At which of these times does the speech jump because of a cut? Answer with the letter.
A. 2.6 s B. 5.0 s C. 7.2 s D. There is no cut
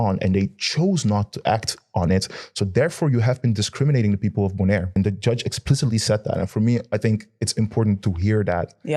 B